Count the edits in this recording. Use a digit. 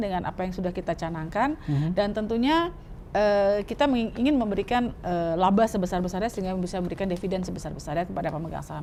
0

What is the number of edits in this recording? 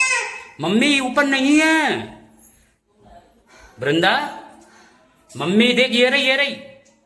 0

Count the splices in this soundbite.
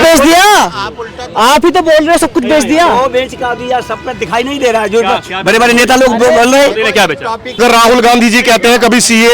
1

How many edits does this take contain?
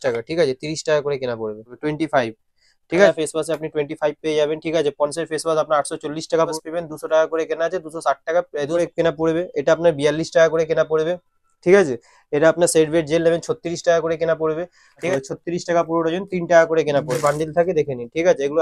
6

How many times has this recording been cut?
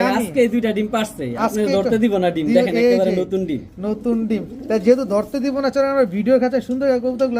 0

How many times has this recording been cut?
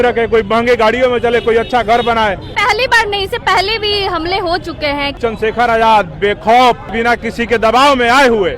3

